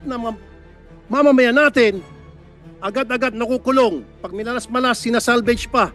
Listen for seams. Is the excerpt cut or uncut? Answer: uncut